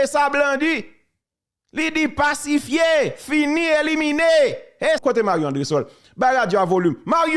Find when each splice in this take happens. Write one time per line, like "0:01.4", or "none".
0:05.0

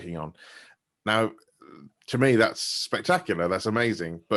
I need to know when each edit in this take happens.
none

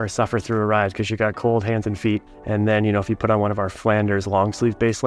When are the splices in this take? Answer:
0:02.3

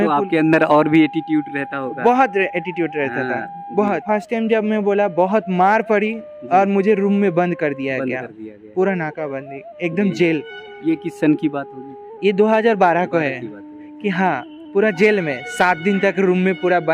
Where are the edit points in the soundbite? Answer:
0:04.0

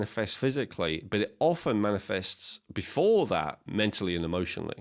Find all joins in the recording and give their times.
none

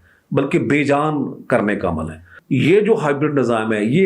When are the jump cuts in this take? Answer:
0:02.3

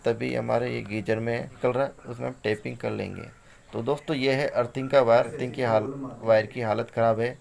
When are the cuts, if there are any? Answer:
0:01.6
0:05.4

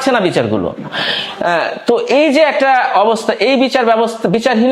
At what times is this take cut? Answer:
none

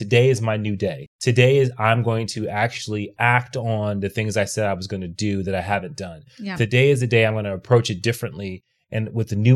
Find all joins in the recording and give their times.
0:01.1

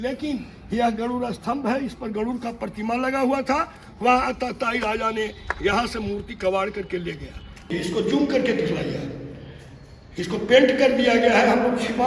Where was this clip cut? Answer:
0:07.7

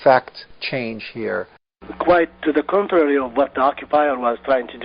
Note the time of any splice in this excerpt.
0:01.9

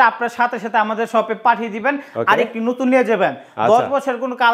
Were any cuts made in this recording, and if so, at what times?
none

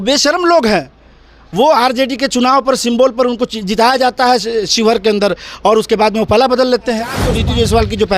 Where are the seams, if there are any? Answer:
0:07.3

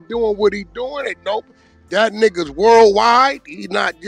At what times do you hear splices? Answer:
none

